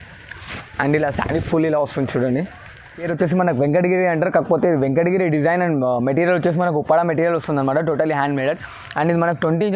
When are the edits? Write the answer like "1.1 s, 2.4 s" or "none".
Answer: 3.1 s